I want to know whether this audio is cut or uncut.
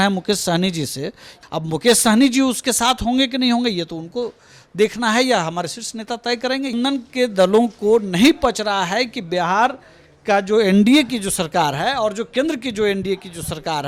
cut